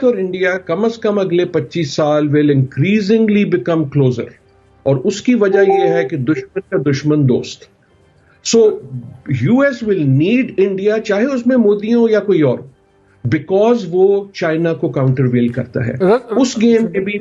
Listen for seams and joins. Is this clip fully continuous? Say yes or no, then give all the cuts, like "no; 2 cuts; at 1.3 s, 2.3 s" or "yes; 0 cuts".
yes; 0 cuts